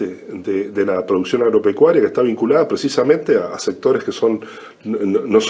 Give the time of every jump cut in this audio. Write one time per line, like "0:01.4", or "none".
none